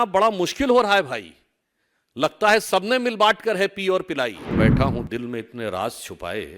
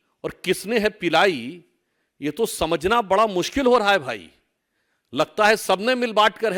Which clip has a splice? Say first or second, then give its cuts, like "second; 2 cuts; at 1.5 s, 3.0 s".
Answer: first; 1 cut; at 4.5 s